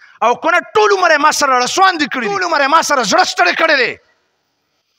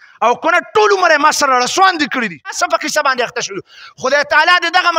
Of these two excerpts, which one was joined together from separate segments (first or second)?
second